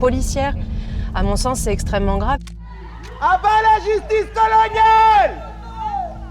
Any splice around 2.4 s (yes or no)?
yes